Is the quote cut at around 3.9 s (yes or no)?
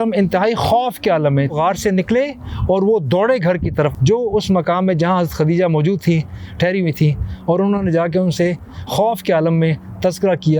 yes